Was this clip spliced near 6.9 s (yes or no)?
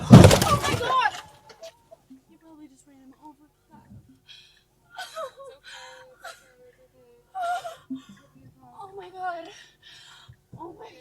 yes